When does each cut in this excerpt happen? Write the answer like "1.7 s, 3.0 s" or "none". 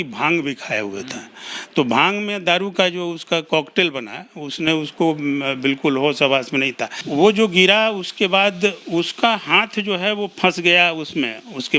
7.0 s